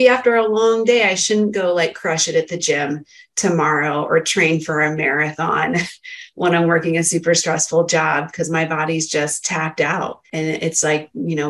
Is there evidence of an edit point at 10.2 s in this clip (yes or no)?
yes